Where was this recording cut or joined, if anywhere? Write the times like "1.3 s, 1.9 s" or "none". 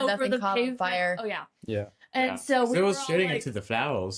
none